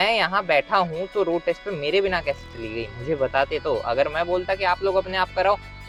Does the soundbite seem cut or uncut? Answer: uncut